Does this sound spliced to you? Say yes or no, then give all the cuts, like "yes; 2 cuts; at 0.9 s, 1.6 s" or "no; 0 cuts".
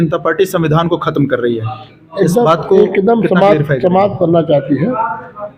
no; 0 cuts